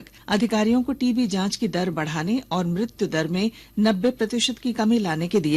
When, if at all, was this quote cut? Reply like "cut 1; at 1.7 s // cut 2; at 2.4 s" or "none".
none